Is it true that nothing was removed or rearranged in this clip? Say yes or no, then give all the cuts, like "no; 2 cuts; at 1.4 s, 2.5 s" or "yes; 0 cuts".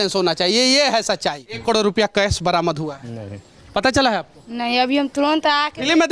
no; 1 cut; at 1.5 s